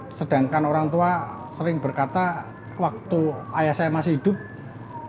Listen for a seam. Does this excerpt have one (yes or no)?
no